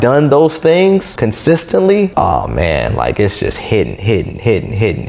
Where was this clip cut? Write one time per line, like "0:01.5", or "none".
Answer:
0:01.1
0:02.1